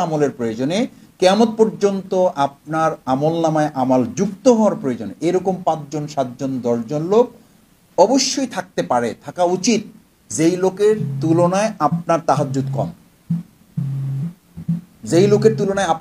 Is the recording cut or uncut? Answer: uncut